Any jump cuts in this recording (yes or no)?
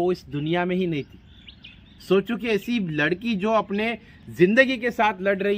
no